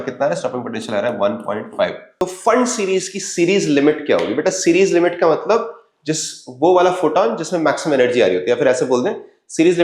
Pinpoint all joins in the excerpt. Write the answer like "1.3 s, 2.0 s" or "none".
2.0 s